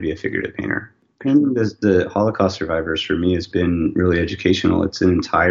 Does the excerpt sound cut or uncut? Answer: cut